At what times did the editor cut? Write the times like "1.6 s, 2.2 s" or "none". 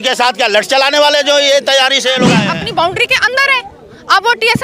2.4 s